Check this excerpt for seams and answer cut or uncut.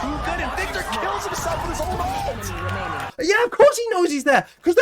cut